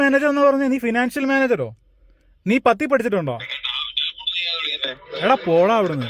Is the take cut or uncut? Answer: uncut